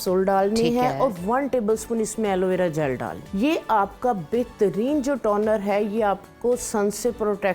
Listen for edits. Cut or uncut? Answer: cut